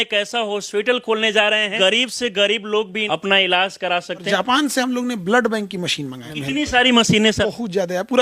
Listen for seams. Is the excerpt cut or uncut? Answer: cut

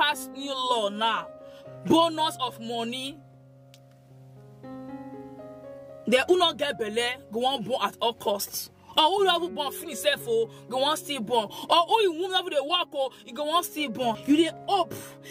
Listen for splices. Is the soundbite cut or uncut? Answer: cut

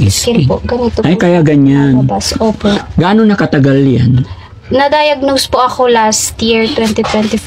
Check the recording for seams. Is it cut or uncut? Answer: uncut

